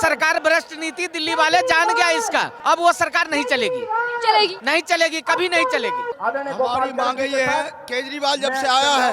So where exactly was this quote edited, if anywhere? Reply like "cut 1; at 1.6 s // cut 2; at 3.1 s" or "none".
cut 1; at 2.5 s // cut 2; at 4.6 s // cut 3; at 6.1 s